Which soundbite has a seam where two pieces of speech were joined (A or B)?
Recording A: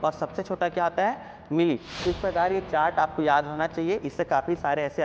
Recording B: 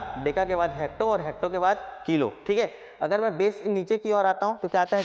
A